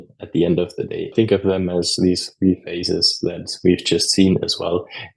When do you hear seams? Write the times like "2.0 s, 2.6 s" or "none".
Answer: 1.0 s